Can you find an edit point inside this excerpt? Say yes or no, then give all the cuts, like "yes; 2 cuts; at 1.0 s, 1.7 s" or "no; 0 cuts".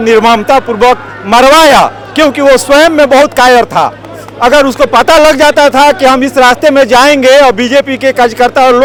no; 0 cuts